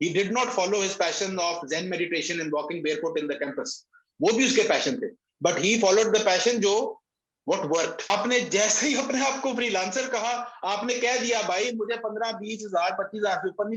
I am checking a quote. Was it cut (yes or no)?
yes